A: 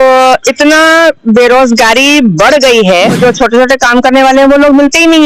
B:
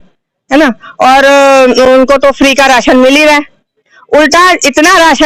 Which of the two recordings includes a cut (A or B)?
A